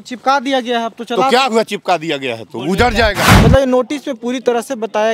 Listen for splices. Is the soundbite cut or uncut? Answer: cut